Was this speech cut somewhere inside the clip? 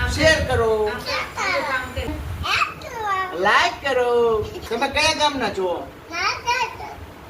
yes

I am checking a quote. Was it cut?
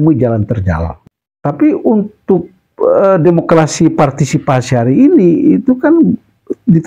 yes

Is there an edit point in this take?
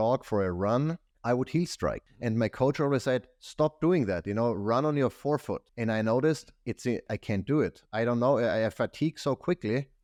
no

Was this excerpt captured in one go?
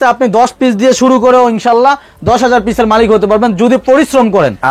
yes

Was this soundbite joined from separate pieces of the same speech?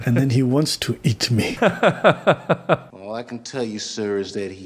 yes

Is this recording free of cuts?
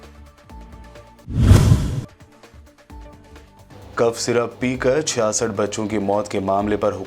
yes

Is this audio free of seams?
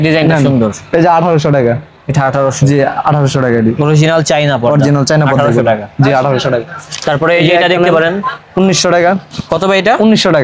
yes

